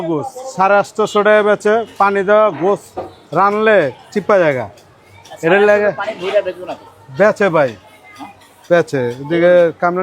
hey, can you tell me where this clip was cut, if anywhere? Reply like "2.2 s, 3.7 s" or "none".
none